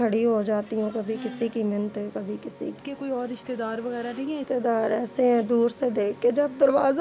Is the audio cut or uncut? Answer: cut